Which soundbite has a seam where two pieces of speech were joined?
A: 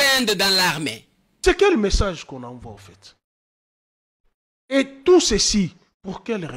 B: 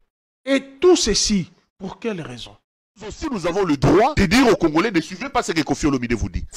B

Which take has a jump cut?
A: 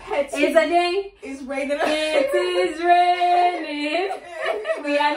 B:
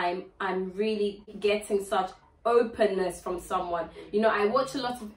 B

